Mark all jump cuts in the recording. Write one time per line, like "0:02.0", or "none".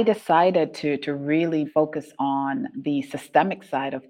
0:01.7
0:02.7